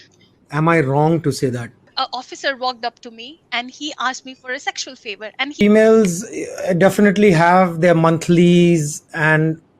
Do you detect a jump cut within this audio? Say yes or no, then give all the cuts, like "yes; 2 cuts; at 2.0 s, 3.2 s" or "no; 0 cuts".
yes; 2 cuts; at 1.9 s, 5.6 s